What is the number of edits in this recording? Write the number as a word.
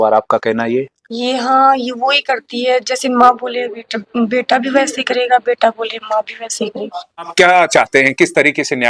one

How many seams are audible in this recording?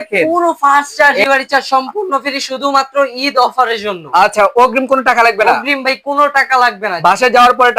one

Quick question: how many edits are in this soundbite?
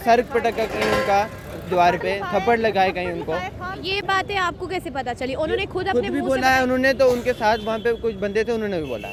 zero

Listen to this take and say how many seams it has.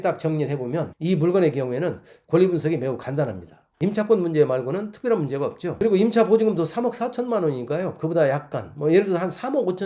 one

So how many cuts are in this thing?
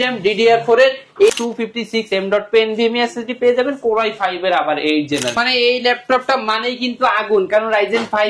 two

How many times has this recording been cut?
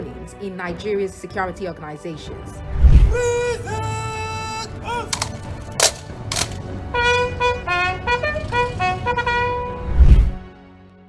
zero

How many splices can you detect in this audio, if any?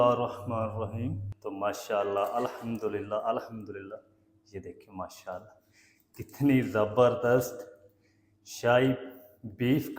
one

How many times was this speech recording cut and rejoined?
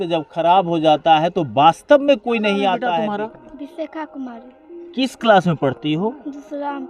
one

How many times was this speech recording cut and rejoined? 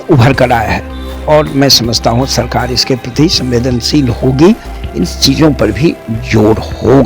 one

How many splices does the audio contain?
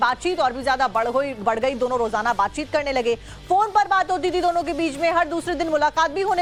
zero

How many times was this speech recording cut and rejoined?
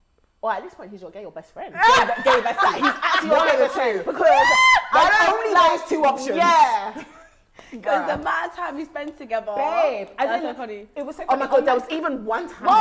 zero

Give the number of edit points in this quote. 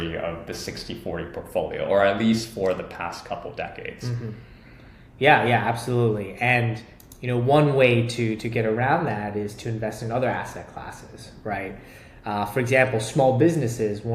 zero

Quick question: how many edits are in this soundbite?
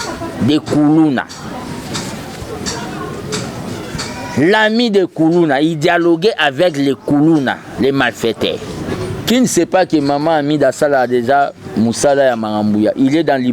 one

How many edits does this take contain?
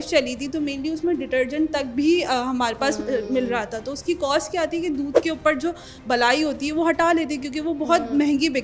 zero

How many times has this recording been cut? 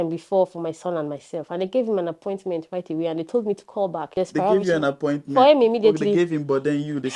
one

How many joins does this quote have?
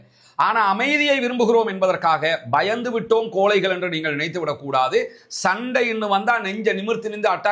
zero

